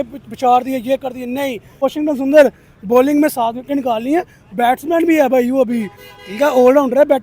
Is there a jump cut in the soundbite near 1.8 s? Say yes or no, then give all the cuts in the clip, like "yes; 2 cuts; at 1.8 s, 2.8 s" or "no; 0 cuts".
yes; 1 cut; at 1.8 s